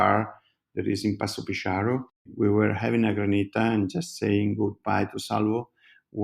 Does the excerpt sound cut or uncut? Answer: cut